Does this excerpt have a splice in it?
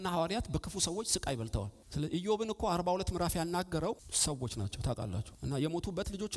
yes; 3 cuts; at 1.8 s, 4.1 s, 5.3 s

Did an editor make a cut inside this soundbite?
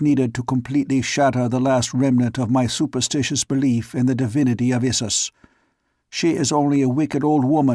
no; 0 cuts

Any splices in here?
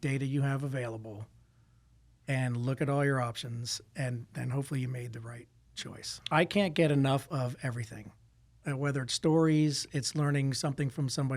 yes; 1 cut; at 6.2 s

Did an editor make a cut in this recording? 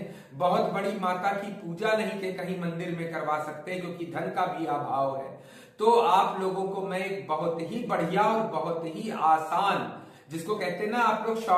no; 0 cuts

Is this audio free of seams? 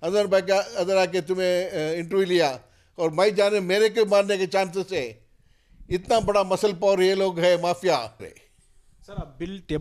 no; 1 cut; at 8.2 s

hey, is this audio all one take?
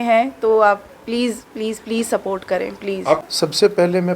no; 1 cut; at 3.2 s

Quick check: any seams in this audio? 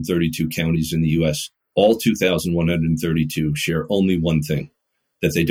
yes; 1 cut; at 1.5 s

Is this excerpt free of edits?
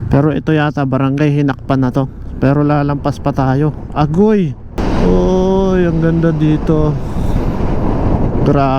no; 1 cut; at 4.8 s

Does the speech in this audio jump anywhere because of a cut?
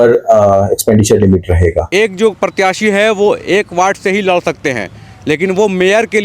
yes; 1 cut; at 1.9 s

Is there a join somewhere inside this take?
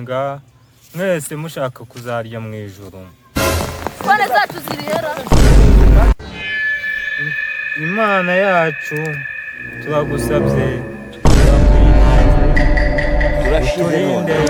no; 0 cuts

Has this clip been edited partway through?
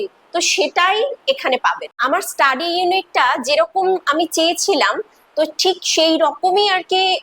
yes; 1 cut; at 1.9 s

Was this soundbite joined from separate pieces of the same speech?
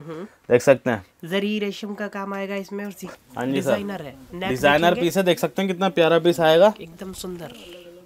yes; 1 cut; at 3.1 s

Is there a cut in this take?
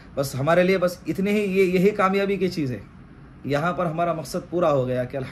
no; 0 cuts

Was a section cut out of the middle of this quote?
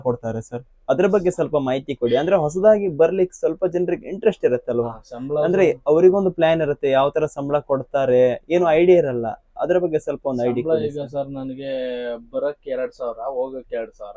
no; 0 cuts

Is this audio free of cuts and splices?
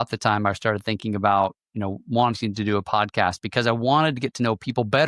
yes; 0 cuts

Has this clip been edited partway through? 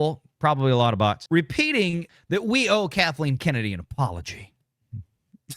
yes; 2 cuts; at 1.2 s, 2.0 s

